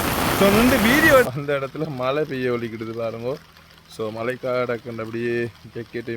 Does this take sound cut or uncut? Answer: cut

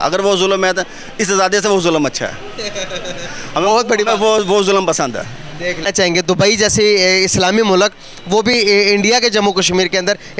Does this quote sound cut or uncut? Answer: cut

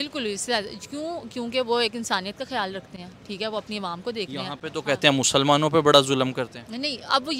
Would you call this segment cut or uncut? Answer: uncut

